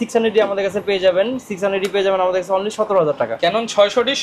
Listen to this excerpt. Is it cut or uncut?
uncut